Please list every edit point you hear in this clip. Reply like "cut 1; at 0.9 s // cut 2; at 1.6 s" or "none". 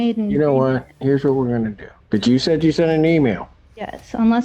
cut 1; at 0.9 s // cut 2; at 1.9 s

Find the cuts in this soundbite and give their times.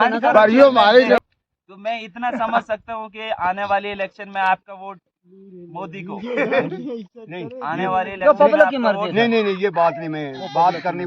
cut 1; at 1.2 s

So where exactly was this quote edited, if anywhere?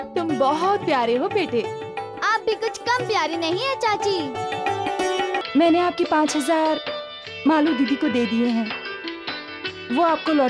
cut 1; at 5.4 s

